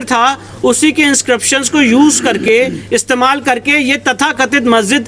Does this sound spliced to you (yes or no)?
no